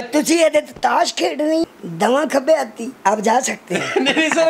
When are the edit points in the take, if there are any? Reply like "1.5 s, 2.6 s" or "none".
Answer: 1.7 s, 2.8 s